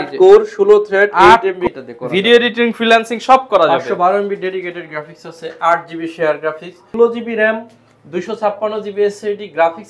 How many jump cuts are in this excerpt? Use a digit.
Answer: 2